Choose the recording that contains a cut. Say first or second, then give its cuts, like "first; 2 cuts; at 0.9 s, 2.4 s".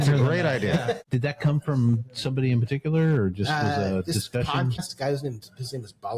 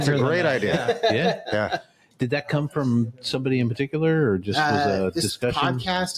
first; 2 cuts; at 1.0 s, 4.8 s